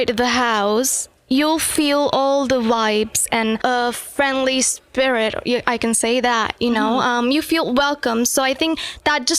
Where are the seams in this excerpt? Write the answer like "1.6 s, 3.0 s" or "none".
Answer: 3.6 s